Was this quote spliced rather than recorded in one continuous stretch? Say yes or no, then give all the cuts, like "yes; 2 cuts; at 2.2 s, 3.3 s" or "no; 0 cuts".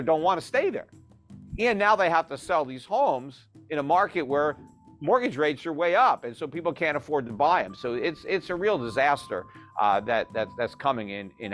no; 0 cuts